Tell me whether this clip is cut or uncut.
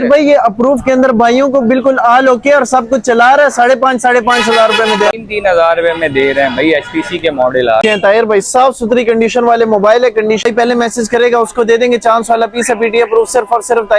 cut